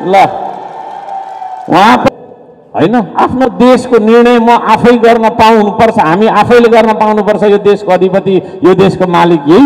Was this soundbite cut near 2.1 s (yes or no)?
yes